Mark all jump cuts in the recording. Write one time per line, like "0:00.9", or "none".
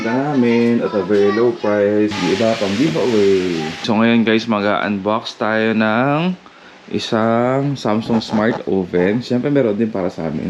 0:02.2
0:03.8